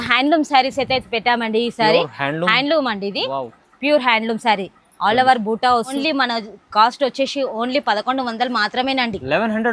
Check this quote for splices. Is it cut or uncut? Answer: cut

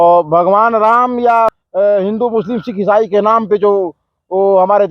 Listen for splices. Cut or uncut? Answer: cut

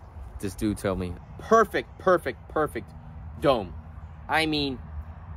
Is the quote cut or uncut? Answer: cut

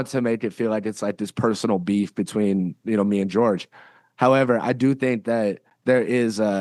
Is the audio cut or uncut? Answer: cut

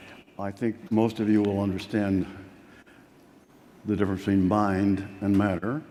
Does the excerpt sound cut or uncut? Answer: uncut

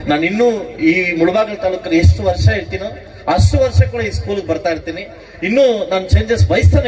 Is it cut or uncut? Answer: uncut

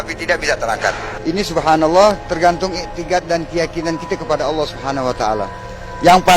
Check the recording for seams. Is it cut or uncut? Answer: cut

